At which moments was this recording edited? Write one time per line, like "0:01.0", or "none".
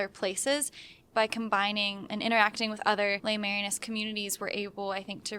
0:01.0
0:02.0
0:03.2